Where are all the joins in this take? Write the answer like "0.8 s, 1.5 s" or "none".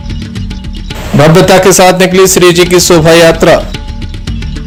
none